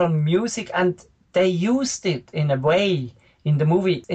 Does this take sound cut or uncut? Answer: uncut